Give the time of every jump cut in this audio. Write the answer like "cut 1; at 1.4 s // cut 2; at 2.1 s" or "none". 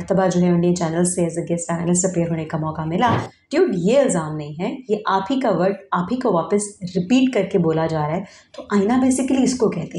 cut 1; at 3.3 s